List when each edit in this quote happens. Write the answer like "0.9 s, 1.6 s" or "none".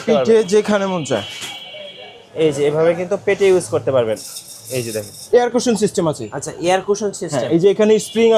5.1 s